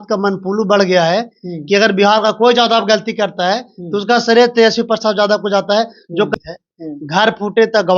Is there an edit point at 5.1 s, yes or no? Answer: no